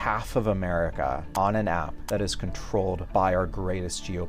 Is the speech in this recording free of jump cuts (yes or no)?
no